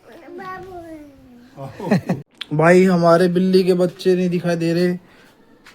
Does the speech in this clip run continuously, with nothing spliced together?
no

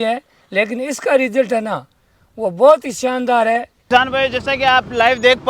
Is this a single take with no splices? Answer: no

